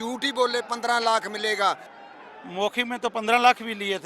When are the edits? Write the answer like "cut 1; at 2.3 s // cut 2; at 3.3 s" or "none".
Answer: cut 1; at 1.9 s